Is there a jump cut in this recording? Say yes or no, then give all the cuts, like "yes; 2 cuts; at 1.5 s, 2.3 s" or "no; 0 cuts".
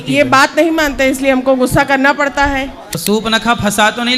yes; 1 cut; at 2.9 s